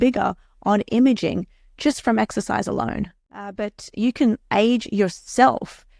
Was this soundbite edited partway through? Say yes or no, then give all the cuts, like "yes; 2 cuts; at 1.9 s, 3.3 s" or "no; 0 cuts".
yes; 1 cut; at 3.5 s